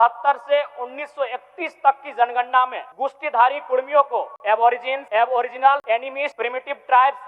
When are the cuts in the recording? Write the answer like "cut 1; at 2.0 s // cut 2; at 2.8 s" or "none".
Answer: cut 1; at 2.8 s // cut 2; at 4.6 s // cut 3; at 6.0 s